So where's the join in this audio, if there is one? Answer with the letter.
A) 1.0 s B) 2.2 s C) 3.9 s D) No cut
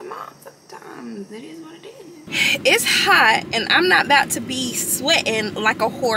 B